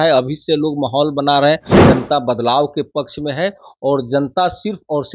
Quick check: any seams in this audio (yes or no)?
yes